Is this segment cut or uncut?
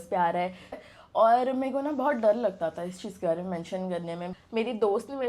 cut